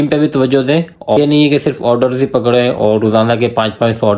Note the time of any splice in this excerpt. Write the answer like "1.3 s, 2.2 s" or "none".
1.2 s